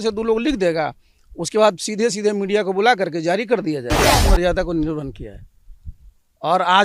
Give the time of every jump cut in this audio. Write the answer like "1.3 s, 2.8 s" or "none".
4.2 s